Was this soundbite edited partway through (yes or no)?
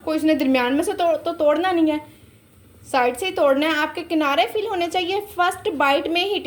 no